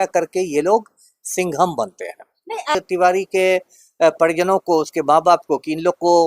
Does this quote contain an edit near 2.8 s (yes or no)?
yes